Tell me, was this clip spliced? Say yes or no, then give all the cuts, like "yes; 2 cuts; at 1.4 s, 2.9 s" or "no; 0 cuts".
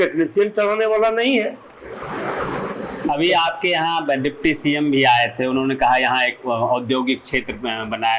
no; 0 cuts